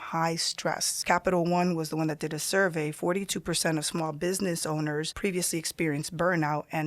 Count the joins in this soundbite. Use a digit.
2